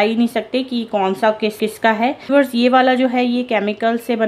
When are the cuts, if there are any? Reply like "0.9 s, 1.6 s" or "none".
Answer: 1.6 s